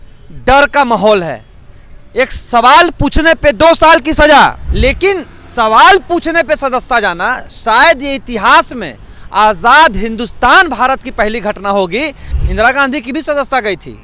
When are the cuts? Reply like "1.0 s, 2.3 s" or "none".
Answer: 4.6 s, 12.3 s